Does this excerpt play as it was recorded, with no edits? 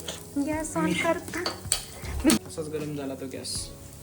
no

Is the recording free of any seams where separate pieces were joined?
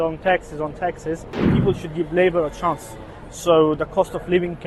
no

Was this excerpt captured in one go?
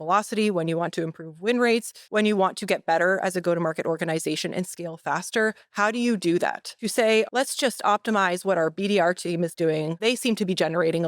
no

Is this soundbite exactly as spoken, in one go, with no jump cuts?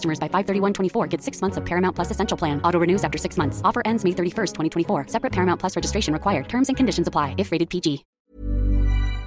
no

